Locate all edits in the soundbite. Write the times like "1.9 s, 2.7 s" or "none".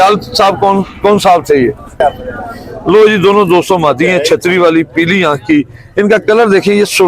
2.0 s